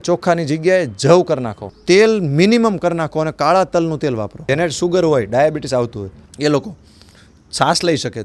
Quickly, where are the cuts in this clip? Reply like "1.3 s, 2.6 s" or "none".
1.8 s, 4.4 s